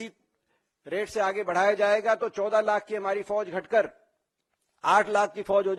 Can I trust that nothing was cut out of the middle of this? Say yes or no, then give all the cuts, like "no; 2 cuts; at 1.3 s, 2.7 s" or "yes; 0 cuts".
yes; 0 cuts